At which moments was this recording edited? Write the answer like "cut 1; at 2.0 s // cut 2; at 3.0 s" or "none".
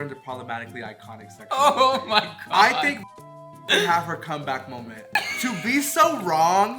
cut 1; at 5.1 s